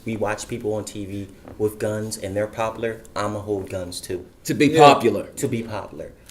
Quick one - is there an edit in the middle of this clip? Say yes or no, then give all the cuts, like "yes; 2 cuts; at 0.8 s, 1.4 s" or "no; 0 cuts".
no; 0 cuts